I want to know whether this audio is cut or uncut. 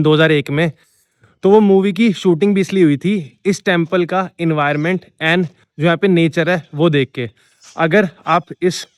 uncut